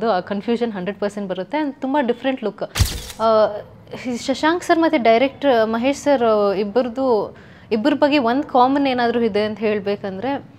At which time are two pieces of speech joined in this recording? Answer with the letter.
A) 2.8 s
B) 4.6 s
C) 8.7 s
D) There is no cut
A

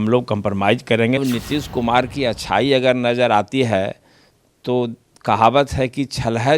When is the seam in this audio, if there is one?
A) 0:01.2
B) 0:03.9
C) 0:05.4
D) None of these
A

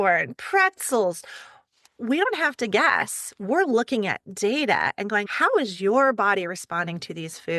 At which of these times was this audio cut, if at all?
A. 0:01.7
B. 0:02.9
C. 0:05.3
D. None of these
C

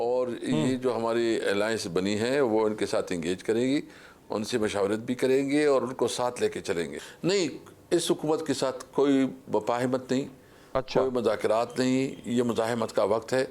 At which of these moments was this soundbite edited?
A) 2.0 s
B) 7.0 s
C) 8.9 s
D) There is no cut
B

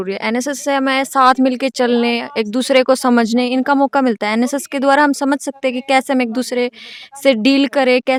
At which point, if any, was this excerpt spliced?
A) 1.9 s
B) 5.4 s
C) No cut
C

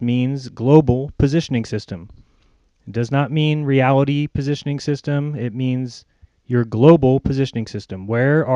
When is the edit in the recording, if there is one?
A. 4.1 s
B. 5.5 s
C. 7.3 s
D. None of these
B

